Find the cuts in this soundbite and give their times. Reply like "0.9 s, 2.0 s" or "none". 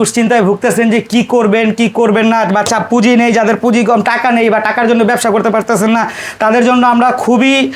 none